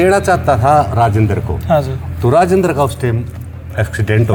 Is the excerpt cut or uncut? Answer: uncut